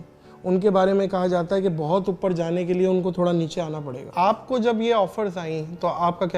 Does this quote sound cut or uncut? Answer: cut